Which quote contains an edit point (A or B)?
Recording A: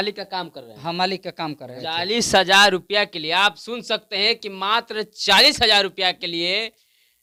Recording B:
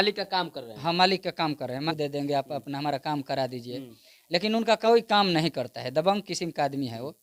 B